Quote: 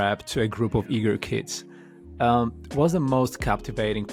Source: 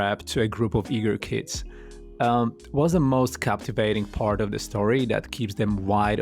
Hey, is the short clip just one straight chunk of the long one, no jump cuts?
yes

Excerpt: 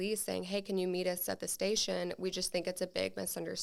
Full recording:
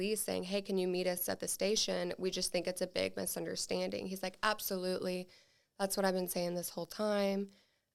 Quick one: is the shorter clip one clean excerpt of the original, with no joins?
yes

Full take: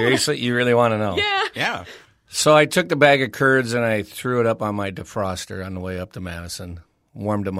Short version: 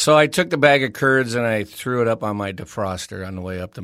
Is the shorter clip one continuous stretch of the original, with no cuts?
yes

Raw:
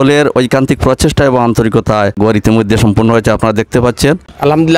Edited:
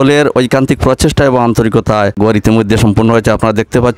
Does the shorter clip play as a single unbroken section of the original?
yes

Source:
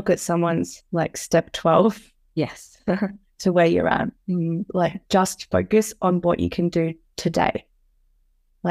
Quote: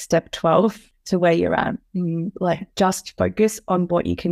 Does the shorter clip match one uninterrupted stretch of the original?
no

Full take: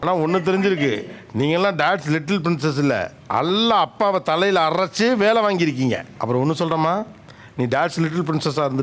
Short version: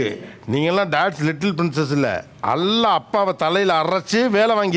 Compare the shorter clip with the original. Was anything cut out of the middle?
no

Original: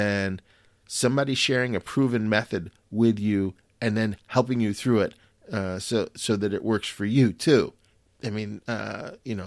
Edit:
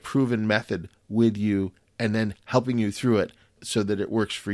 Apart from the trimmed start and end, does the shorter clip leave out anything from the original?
yes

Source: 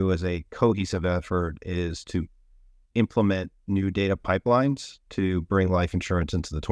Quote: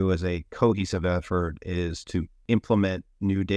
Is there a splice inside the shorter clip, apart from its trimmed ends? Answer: yes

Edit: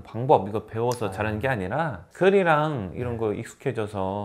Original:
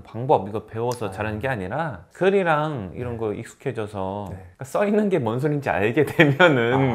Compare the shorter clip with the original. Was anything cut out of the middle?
no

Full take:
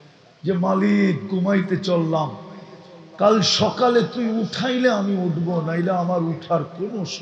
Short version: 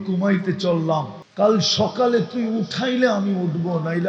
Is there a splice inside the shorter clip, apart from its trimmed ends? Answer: yes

